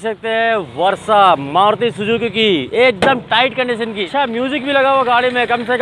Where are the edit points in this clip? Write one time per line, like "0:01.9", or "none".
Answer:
0:04.0